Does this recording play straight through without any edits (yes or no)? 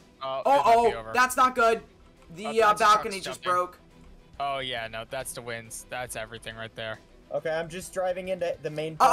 yes